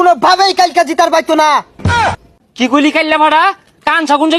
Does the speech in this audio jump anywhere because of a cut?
no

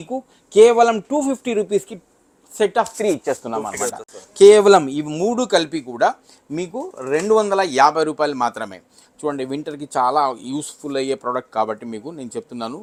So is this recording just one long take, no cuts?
yes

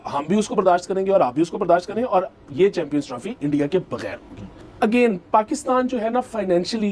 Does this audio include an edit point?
no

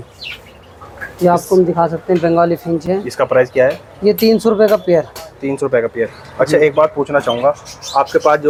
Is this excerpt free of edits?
yes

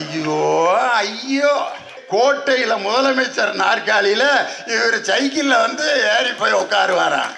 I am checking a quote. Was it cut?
yes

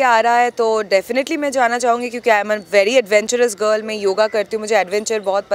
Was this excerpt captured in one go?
yes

